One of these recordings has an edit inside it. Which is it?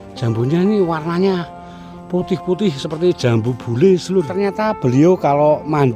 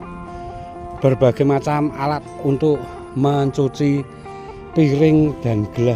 first; 1 cut; at 4.4 s

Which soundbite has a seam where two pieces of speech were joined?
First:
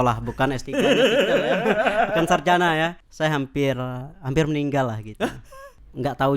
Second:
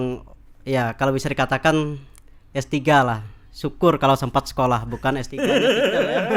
first; 1 cut; at 3.0 s

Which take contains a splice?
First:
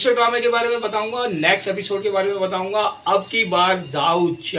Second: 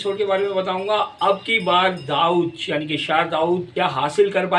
second; 1 cut; at 3.7 s

